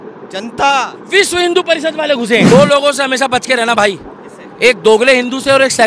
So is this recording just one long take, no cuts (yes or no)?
no